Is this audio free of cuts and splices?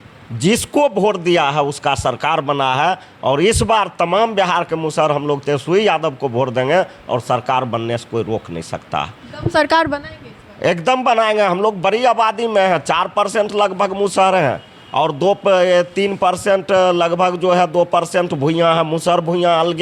yes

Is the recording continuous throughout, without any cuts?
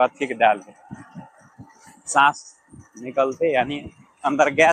yes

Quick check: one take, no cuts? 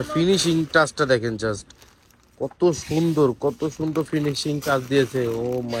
yes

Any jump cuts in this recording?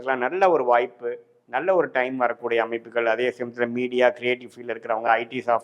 no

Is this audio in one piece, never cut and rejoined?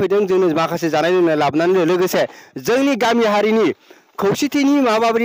yes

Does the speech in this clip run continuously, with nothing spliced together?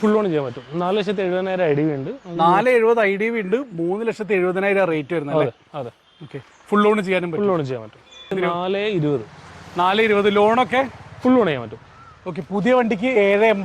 no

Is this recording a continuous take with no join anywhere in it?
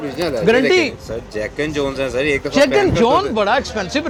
yes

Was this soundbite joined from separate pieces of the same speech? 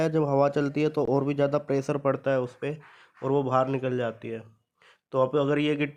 no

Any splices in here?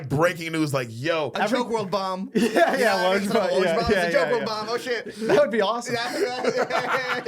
yes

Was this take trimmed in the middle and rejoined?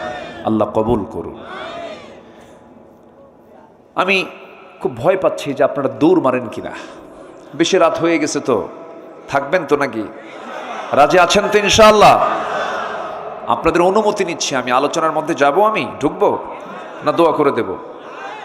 no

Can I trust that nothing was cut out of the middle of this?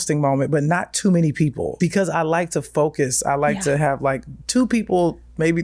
no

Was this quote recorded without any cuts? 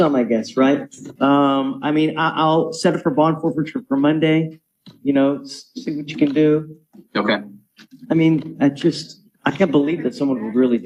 yes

